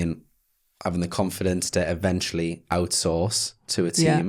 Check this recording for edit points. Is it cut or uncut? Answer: uncut